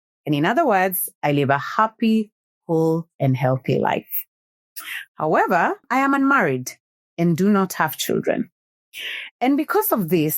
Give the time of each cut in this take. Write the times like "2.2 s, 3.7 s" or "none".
5.8 s